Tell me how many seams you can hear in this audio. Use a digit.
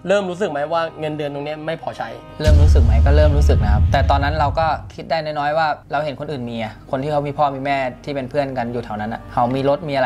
0